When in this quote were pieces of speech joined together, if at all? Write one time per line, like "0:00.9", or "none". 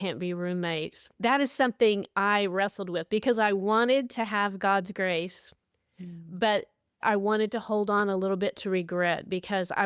0:01.0
0:07.0